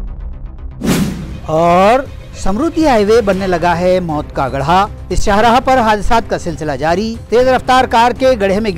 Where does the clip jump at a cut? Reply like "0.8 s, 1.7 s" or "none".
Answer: 0.9 s